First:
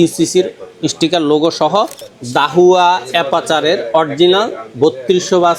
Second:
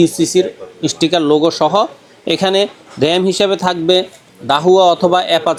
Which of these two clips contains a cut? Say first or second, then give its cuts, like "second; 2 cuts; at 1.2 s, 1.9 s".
first; 1 cut; at 2.1 s